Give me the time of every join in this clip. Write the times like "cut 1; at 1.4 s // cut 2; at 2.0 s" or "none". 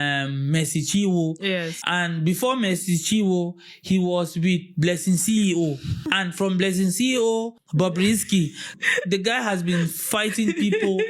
cut 1; at 1.8 s // cut 2; at 6.1 s // cut 3; at 7.6 s // cut 4; at 8.8 s